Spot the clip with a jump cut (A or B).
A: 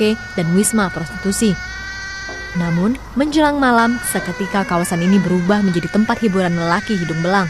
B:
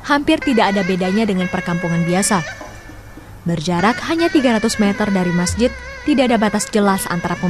B